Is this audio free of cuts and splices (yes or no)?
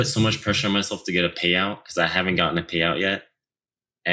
yes